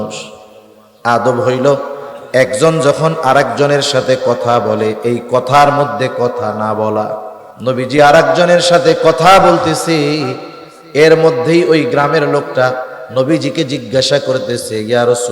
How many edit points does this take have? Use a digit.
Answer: 1